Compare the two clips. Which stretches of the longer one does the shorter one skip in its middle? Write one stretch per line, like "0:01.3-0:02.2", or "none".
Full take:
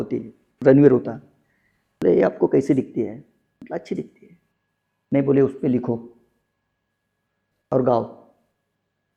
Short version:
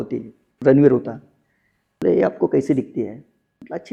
none